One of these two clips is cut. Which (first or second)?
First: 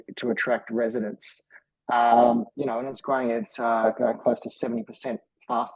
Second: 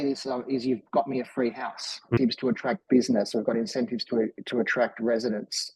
second